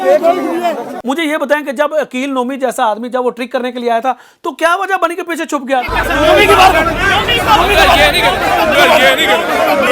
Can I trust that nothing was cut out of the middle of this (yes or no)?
no